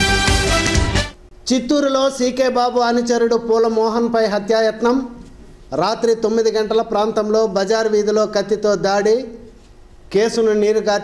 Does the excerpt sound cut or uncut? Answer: cut